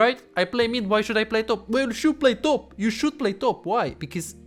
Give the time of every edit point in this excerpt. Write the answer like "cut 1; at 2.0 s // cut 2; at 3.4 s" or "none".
none